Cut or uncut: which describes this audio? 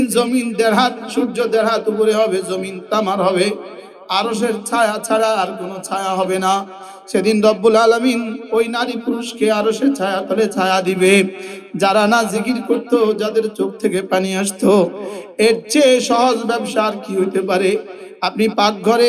uncut